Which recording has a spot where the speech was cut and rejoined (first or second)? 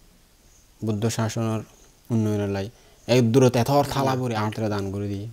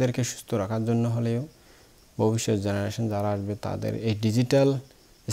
first